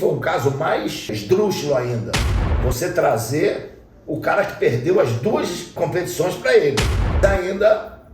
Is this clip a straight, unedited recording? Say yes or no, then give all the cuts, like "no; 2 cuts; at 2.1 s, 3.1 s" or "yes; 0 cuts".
no; 3 cuts; at 1.2 s, 5.7 s, 7.2 s